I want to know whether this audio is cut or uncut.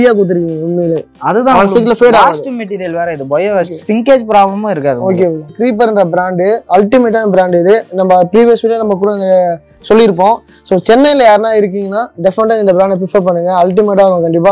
cut